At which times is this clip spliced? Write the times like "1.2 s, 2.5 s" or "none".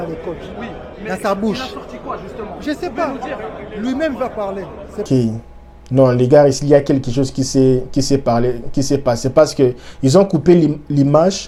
none